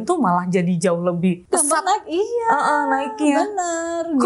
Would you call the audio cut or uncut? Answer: cut